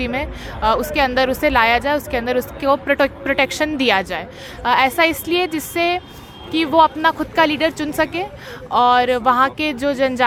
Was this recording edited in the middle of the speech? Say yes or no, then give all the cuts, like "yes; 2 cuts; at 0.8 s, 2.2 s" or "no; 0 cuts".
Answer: no; 0 cuts